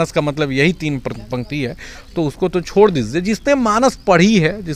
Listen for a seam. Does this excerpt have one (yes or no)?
no